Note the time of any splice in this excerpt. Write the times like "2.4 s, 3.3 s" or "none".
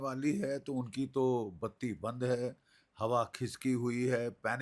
none